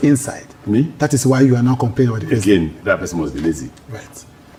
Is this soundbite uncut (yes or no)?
yes